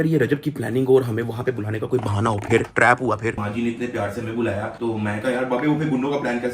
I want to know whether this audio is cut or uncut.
cut